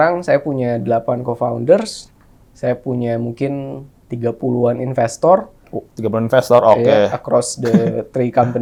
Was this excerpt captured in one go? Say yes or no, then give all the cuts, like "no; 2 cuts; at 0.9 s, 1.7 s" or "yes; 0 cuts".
yes; 0 cuts